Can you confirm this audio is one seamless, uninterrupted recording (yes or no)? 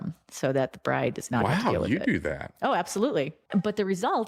no